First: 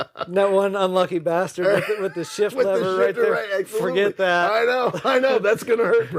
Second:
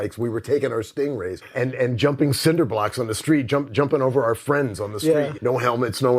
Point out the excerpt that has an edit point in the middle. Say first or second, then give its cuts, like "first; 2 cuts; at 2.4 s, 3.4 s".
second; 2 cuts; at 1.4 s, 5.3 s